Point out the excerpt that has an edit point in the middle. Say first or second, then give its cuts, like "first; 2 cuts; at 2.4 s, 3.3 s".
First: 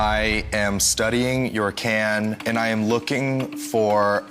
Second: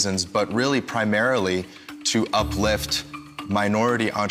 first; 1 cut; at 2.4 s